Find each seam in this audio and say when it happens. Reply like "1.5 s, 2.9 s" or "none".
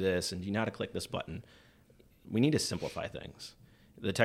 2.2 s